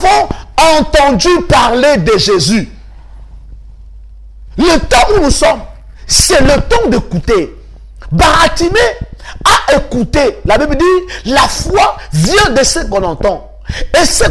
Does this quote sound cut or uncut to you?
uncut